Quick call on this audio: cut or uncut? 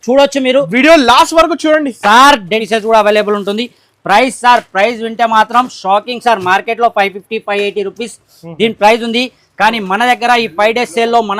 cut